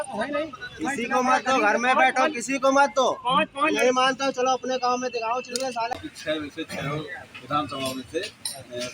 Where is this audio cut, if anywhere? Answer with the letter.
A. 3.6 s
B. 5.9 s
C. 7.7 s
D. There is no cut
B